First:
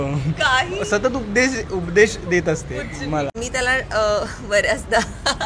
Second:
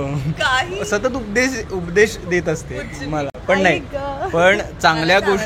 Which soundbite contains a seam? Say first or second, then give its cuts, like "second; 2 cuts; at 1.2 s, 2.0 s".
first; 1 cut; at 3.4 s